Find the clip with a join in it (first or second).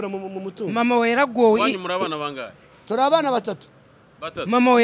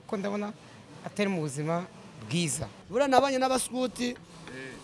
second